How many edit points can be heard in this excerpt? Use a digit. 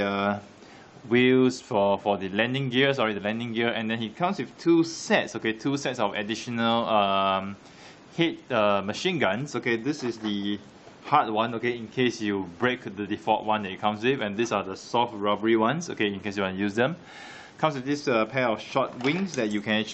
1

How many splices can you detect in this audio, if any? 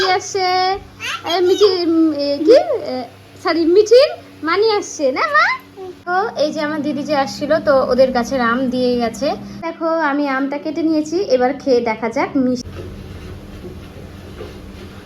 4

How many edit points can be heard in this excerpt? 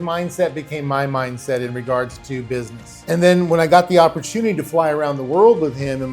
1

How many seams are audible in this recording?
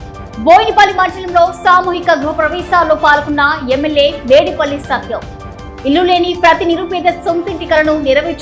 0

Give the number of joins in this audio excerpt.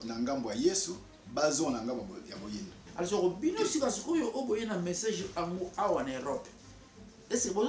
1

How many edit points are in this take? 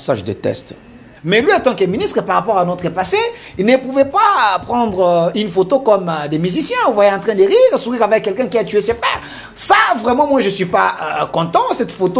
1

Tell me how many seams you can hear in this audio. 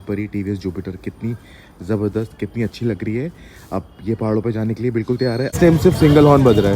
1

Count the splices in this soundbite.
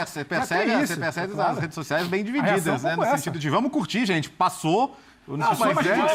0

